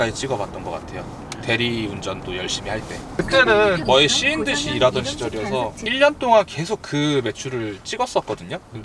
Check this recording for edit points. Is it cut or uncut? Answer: uncut